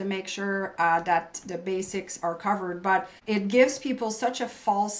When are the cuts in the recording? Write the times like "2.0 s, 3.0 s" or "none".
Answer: 3.1 s